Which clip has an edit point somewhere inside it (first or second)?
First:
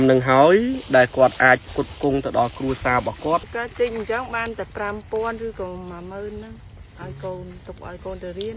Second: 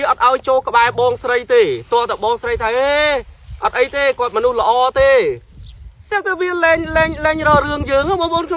first